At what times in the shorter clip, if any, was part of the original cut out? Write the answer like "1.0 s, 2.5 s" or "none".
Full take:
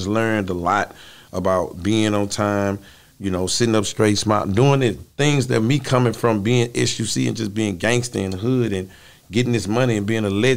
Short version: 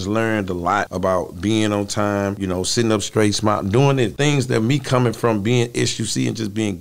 0.9 s, 2.4 s, 4.1 s